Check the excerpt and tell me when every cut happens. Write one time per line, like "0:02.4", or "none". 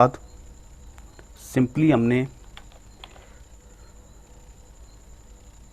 none